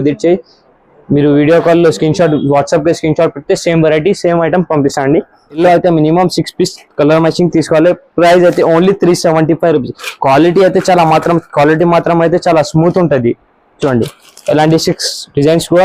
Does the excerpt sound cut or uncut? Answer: cut